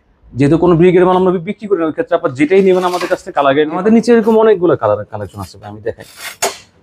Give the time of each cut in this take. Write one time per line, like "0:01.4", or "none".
0:03.8